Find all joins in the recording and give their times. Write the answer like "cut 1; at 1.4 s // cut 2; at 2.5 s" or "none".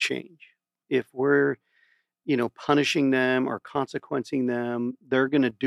none